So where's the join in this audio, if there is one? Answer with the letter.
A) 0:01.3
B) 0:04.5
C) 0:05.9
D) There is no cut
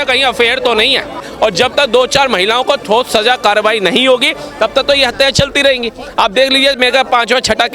A